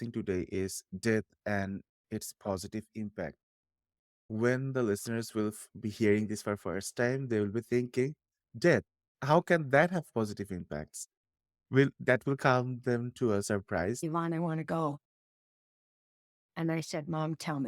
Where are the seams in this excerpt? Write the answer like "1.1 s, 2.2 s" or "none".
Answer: 4.3 s, 14.0 s